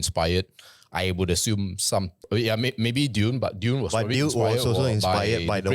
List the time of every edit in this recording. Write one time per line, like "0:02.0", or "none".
0:02.1